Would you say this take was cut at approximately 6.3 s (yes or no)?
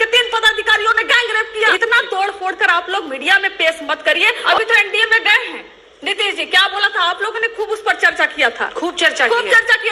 no